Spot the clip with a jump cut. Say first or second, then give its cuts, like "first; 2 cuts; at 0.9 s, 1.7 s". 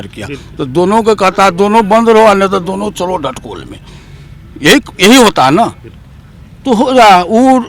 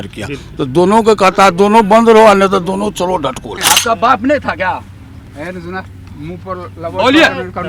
second; 1 cut; at 3.5 s